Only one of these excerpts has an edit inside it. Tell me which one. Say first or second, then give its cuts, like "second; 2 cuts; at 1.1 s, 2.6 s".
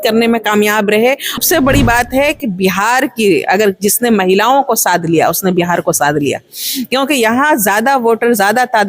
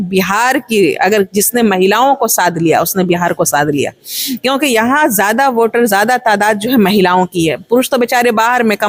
first; 1 cut; at 1.4 s